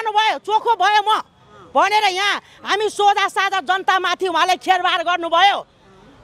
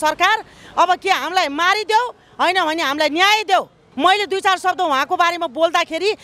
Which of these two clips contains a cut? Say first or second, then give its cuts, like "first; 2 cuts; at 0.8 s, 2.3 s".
second; 1 cut; at 3.8 s